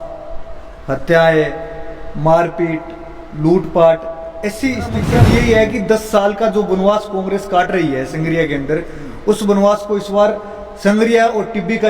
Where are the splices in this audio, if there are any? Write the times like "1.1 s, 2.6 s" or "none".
5.2 s